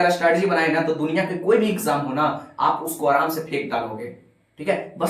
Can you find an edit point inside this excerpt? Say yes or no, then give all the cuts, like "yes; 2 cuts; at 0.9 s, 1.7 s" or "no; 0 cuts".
no; 0 cuts